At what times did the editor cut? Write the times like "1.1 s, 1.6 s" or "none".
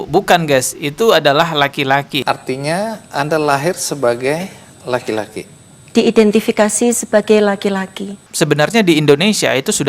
2.1 s, 8.2 s